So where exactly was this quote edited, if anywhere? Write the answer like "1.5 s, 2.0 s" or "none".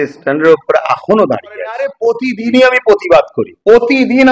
1.9 s